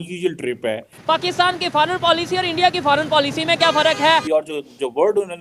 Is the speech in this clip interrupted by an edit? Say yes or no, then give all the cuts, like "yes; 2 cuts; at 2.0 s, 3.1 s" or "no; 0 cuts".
yes; 2 cuts; at 1.0 s, 4.2 s